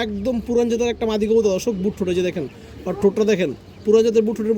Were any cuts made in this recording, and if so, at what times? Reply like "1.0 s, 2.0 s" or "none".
none